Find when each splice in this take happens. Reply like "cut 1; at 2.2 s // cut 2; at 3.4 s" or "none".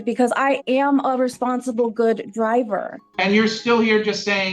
cut 1; at 3.0 s